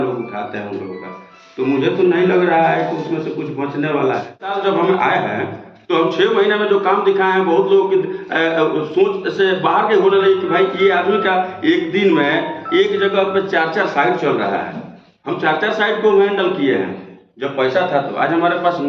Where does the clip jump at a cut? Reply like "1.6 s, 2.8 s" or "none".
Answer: 4.5 s